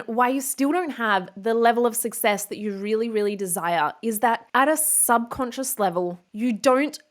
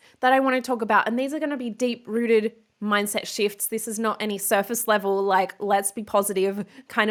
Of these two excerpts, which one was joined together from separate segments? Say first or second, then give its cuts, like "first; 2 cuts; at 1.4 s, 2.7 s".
first; 1 cut; at 4.5 s